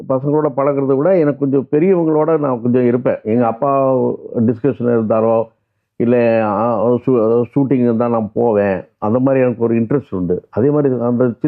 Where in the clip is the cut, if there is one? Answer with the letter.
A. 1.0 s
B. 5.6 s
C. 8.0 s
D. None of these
D